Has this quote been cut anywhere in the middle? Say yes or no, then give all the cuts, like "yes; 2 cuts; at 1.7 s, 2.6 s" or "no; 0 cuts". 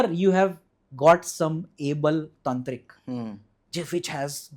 no; 0 cuts